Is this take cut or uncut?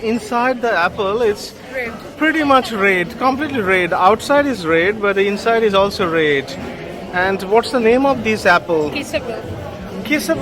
uncut